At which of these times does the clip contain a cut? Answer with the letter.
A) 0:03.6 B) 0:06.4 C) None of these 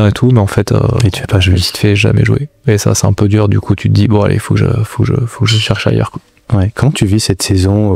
C